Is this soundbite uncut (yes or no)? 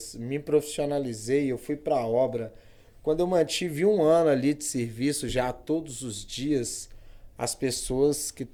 yes